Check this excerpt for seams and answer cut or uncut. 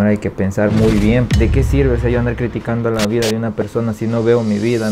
cut